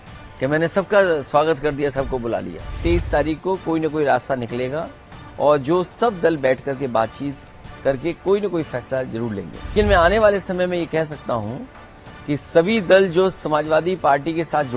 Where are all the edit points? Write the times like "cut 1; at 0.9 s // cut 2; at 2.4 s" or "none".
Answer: cut 1; at 2.7 s // cut 2; at 9.7 s